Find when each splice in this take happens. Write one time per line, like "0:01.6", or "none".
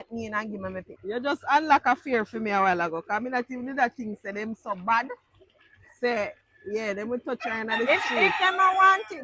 0:01.0

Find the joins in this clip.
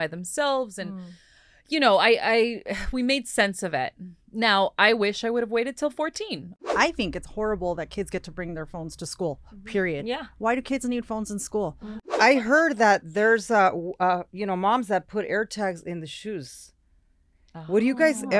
0:06.7
0:12.1

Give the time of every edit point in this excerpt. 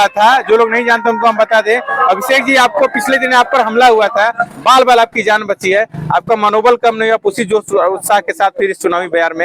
none

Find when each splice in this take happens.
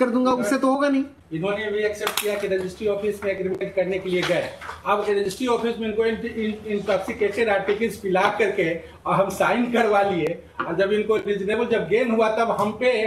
0:01.2

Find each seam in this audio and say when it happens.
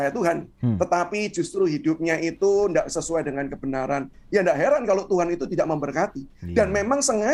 none

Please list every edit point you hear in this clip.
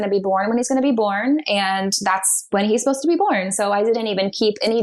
none

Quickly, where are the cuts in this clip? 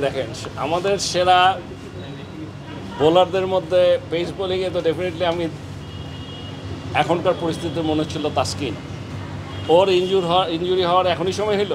none

